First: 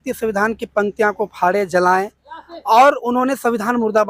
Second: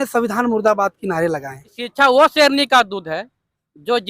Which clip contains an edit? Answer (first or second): second